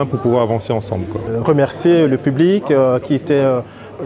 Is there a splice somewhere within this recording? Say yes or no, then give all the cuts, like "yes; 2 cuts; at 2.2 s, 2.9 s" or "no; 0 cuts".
yes; 1 cut; at 1.3 s